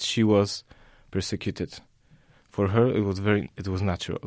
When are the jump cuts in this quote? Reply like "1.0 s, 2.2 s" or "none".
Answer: none